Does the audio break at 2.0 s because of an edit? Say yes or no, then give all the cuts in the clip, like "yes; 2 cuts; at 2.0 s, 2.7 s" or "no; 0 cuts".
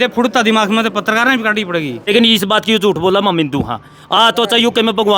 yes; 1 cut; at 2.0 s